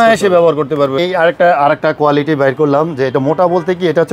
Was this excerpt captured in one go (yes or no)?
no